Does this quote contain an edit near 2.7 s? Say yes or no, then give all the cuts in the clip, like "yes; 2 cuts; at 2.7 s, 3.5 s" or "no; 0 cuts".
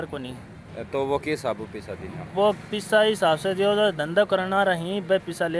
no; 0 cuts